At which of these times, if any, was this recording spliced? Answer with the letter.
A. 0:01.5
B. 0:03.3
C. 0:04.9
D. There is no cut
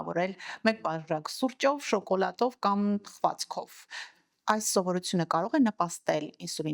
D